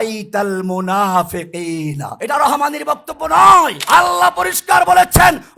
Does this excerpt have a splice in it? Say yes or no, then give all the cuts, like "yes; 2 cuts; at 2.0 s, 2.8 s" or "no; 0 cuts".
yes; 2 cuts; at 2.1 s, 3.8 s